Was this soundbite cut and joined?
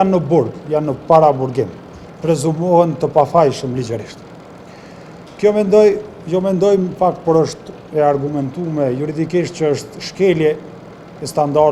no; 0 cuts

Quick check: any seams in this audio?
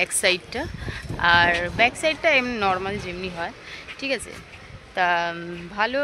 no; 0 cuts

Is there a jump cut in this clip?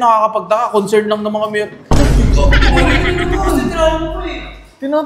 no; 0 cuts

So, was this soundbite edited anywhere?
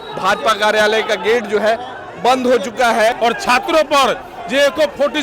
yes; 1 cut; at 3.7 s

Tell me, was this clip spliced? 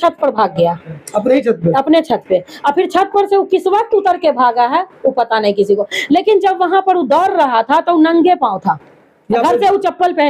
no; 0 cuts

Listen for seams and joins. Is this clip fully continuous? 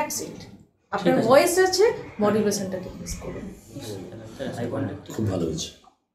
no; 1 cut; at 5.0 s

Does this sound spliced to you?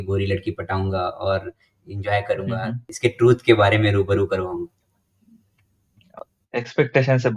yes; 2 cuts; at 2.9 s, 6.2 s

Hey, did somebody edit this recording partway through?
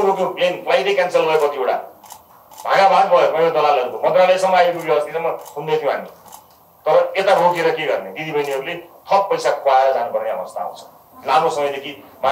no; 0 cuts

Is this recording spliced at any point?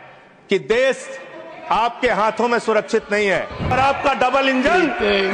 yes; 1 cut; at 3.7 s

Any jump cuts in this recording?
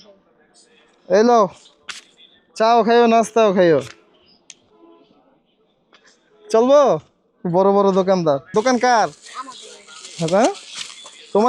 yes; 1 cut; at 8.4 s

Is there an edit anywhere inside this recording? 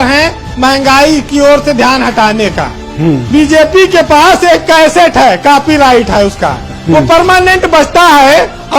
yes; 1 cut; at 3.2 s

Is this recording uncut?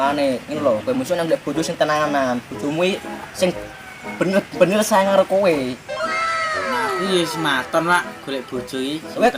yes; 0 cuts

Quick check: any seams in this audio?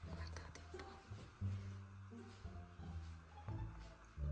no; 0 cuts

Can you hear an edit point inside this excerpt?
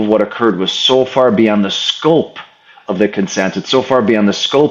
no; 0 cuts

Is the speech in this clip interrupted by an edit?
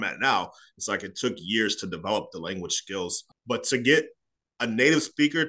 yes; 1 cut; at 3.3 s

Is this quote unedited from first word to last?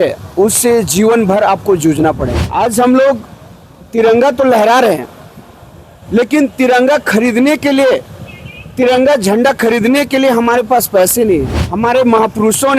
no; 2 cuts; at 2.4 s, 11.6 s

